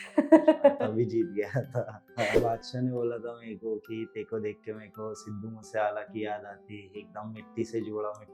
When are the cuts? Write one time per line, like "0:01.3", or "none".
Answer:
0:02.4